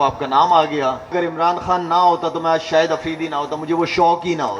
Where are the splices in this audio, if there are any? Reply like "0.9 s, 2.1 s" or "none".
1.1 s